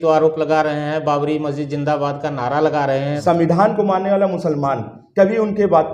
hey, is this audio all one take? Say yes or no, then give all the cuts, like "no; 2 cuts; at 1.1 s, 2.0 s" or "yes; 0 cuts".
no; 1 cut; at 3.2 s